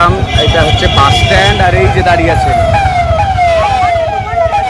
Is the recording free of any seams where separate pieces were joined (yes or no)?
yes